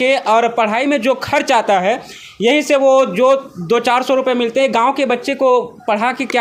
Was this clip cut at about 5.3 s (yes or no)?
no